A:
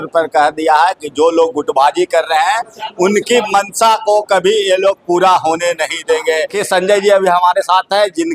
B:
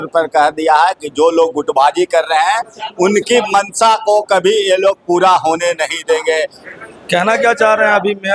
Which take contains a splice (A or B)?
A